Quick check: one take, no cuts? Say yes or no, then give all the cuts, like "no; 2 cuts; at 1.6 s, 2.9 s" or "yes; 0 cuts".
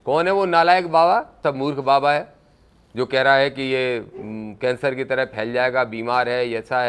no; 1 cut; at 1.4 s